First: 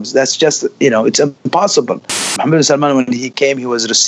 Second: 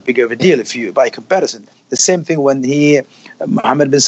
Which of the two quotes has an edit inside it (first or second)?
first